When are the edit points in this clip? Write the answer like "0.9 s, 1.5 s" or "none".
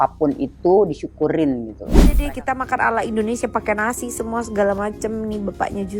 2.2 s